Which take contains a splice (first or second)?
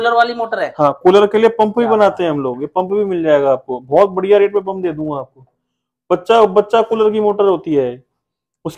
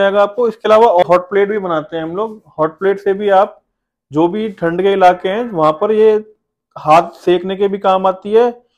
second